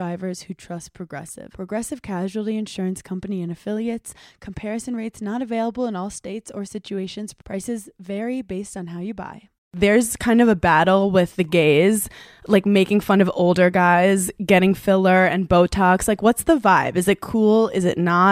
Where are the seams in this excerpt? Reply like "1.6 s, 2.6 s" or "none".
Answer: 9.7 s